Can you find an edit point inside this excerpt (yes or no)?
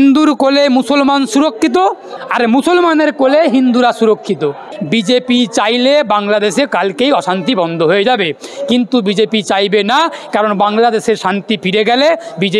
yes